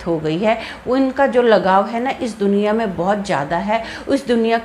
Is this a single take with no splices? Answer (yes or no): yes